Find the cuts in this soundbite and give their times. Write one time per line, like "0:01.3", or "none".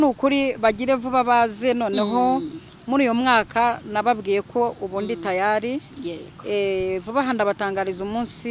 none